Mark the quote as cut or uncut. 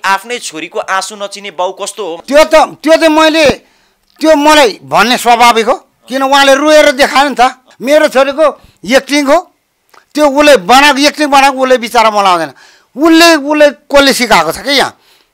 cut